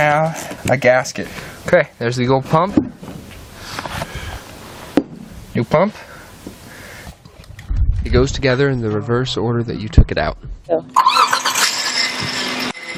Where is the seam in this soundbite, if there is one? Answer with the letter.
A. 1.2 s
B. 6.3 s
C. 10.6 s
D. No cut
D